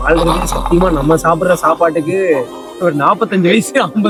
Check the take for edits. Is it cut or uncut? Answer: uncut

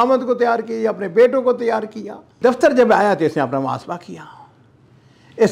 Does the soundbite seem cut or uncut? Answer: cut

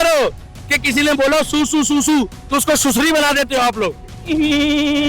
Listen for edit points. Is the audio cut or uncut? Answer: cut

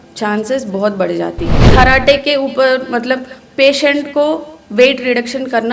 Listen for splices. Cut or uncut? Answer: cut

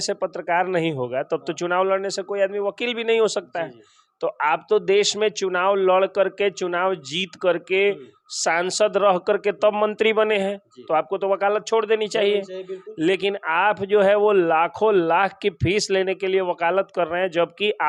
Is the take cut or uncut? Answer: uncut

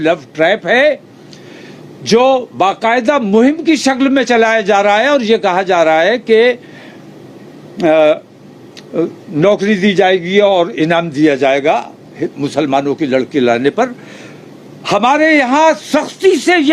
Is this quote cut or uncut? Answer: uncut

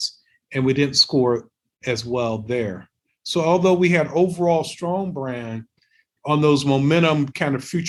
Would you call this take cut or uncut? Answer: uncut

